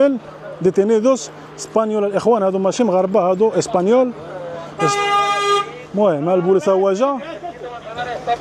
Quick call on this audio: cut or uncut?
uncut